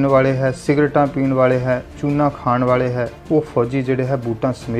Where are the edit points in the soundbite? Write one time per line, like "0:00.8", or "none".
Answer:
0:03.2